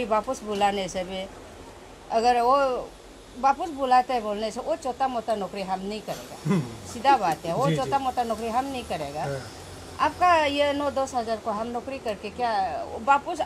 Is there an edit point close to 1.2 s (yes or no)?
no